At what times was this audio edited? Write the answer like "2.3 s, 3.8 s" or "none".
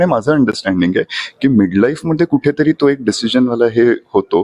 none